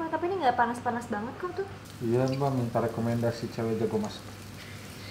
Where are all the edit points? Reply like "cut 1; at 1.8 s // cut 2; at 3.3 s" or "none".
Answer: cut 1; at 1.8 s

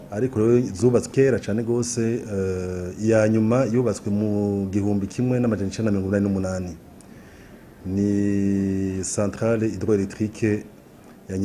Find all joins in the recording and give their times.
cut 1; at 1.1 s

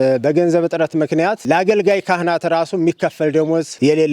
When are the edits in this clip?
cut 1; at 1.4 s

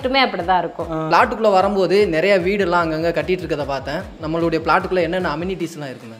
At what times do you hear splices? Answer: cut 1; at 1.1 s

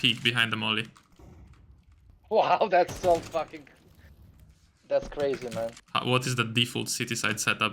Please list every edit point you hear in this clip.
cut 1; at 5.8 s

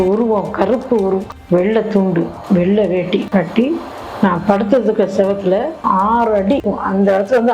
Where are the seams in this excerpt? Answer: cut 1; at 1.3 s // cut 2; at 6.6 s

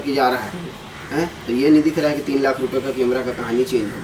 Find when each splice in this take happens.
none

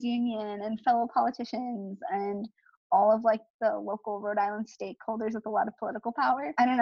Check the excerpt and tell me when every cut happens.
none

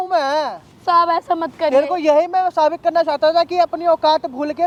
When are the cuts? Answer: none

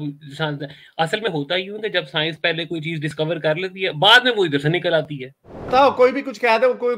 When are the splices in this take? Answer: cut 1; at 5.7 s

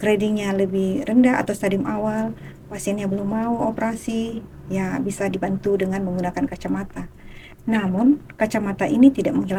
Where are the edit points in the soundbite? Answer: none

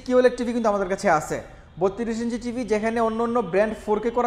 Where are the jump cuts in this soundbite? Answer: none

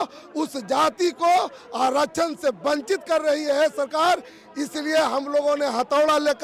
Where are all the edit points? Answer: none

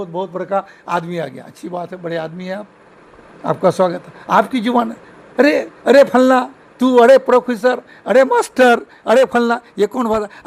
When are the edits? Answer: none

